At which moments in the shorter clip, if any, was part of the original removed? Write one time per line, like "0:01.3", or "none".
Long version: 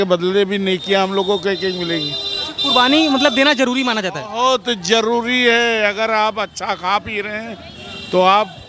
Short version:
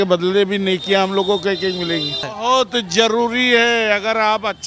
0:02.3